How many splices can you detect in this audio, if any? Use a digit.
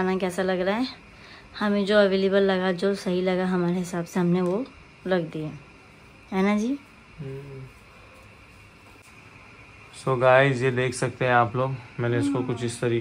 0